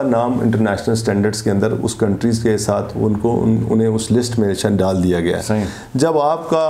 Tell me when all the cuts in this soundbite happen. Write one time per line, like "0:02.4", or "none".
none